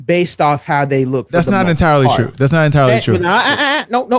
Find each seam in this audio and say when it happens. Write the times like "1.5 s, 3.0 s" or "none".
none